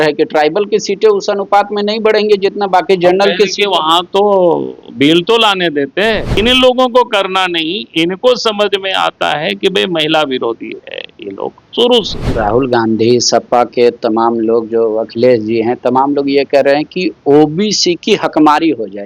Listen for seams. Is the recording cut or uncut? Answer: cut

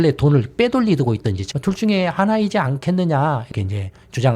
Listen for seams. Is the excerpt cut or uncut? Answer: cut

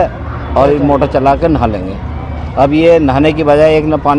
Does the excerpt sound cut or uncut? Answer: uncut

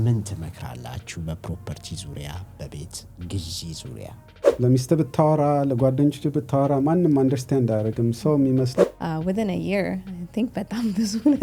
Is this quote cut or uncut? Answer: cut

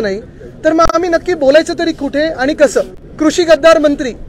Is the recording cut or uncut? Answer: cut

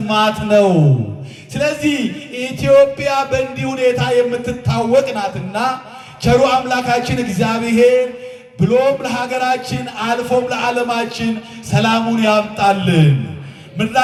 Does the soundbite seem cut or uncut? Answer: uncut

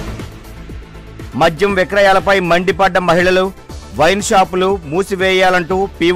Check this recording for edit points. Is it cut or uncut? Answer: cut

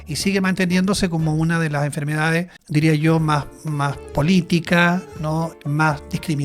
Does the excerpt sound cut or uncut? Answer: cut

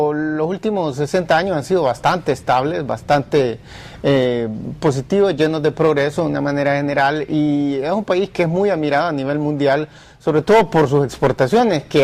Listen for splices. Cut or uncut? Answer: uncut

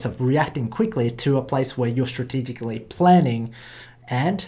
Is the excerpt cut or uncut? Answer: uncut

